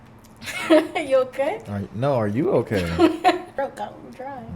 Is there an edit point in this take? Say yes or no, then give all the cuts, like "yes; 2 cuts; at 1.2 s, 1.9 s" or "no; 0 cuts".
yes; 1 cut; at 3.6 s